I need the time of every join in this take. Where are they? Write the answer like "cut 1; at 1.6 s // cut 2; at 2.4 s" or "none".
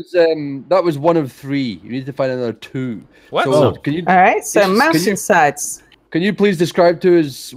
none